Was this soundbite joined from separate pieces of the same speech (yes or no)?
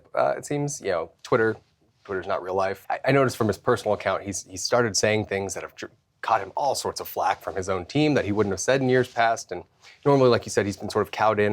yes